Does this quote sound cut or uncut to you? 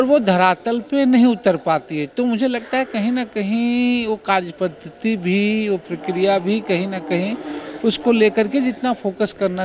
uncut